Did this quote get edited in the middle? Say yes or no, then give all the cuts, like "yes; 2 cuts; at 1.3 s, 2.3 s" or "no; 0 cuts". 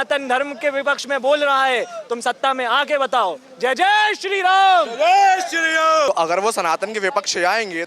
yes; 1 cut; at 6.1 s